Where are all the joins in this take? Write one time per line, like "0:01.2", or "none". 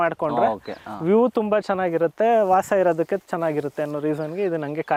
none